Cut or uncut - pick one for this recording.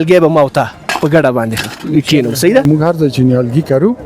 cut